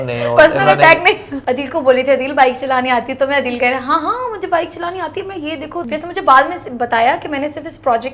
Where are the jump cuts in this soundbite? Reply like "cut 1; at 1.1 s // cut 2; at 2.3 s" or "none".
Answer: cut 1; at 1.3 s // cut 2; at 5.9 s